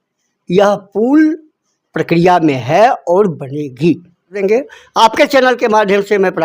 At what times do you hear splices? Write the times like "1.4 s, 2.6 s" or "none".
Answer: 4.3 s